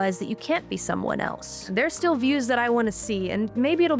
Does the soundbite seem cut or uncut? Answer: cut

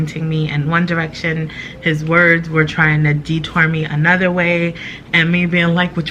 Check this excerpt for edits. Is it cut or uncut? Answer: uncut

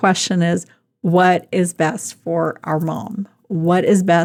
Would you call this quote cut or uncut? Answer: uncut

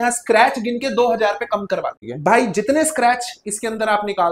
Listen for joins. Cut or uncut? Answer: cut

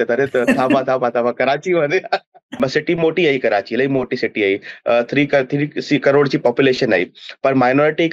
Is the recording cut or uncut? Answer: cut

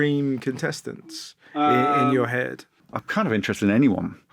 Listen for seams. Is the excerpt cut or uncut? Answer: cut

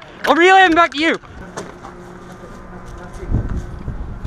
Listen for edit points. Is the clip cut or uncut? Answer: cut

